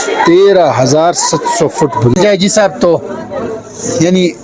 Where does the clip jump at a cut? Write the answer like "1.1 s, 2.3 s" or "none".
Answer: 2.1 s